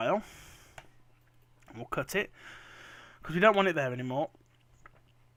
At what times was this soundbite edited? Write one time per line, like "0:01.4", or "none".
none